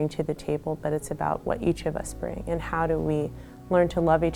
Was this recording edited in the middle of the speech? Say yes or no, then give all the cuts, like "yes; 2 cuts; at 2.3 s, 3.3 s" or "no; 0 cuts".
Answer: no; 0 cuts